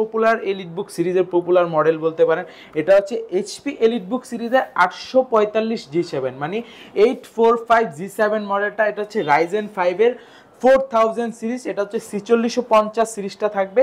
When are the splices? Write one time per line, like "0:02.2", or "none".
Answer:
none